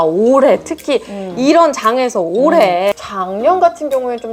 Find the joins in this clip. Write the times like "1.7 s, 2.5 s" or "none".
2.9 s